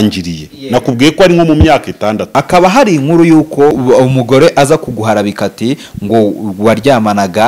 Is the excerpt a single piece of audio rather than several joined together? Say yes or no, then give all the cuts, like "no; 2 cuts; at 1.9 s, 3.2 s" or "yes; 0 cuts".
no; 2 cuts; at 2.2 s, 3.8 s